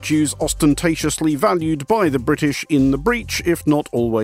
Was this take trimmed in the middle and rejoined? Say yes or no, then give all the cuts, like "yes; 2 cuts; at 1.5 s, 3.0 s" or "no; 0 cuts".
no; 0 cuts